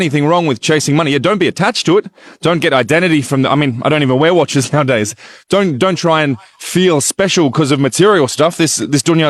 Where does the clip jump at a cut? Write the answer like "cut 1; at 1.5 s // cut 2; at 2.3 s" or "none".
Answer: none